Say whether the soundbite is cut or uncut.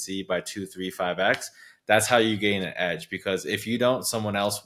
uncut